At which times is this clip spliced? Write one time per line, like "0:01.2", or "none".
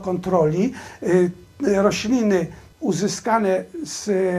0:02.6